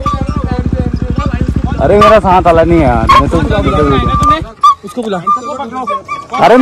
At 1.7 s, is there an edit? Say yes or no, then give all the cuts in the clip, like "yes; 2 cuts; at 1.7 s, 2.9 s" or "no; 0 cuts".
yes; 1 cut; at 1.7 s